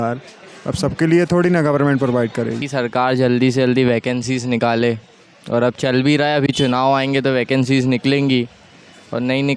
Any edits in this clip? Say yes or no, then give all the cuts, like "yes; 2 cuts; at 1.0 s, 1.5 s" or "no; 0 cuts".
yes; 1 cut; at 2.6 s